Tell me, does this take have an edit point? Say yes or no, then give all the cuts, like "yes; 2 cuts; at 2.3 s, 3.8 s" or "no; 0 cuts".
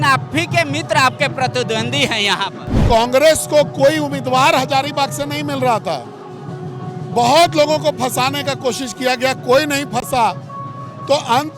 yes; 1 cut; at 2.7 s